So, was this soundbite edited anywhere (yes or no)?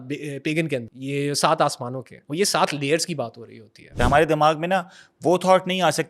yes